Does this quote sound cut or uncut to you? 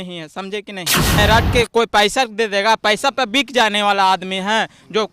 cut